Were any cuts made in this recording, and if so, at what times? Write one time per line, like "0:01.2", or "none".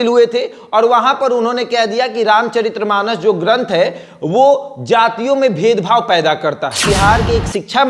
0:06.8